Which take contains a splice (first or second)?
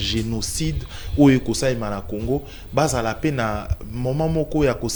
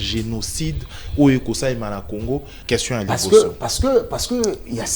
second